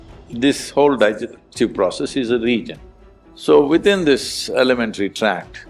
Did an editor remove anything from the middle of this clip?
yes; 1 cut; at 3.0 s

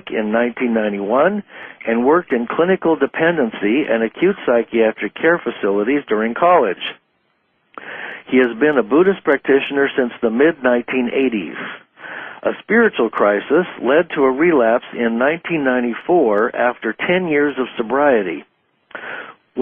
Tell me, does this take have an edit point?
no; 0 cuts

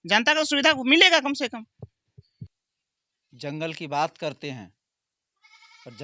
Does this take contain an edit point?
no; 0 cuts

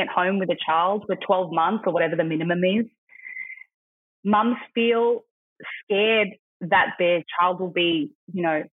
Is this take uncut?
yes; 0 cuts

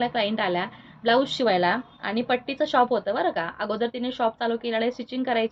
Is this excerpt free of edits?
yes; 0 cuts

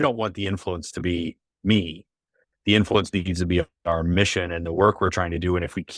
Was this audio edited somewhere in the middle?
no; 0 cuts

